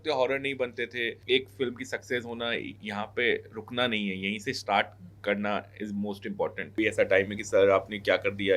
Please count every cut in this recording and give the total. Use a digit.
2